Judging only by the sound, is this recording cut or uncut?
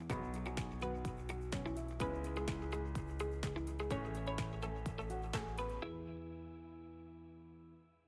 uncut